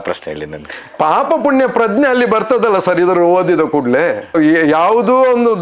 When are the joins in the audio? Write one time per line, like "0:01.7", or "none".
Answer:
none

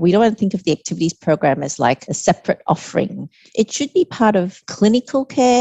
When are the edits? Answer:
0:02.1
0:03.5
0:04.6

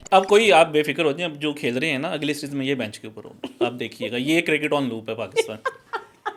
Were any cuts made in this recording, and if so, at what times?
none

